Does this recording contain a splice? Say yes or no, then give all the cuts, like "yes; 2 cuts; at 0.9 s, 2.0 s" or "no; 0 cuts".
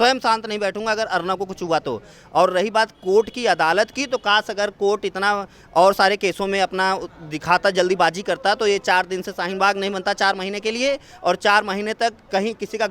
no; 0 cuts